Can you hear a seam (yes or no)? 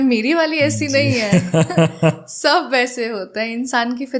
no